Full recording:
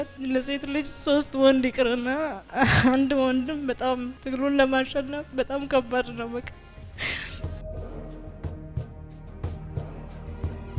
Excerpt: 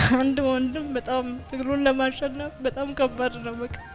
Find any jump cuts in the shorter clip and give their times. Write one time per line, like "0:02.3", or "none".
none